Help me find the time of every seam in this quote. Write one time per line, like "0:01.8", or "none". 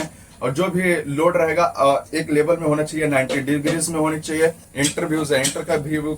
0:04.6